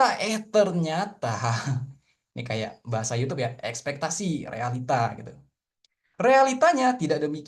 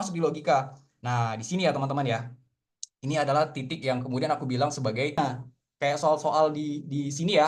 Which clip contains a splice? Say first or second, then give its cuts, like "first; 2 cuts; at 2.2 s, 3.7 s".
second; 1 cut; at 5.2 s